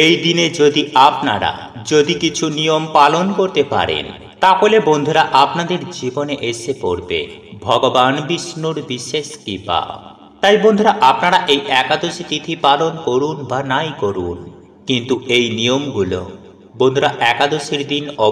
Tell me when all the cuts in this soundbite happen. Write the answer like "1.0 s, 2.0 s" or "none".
none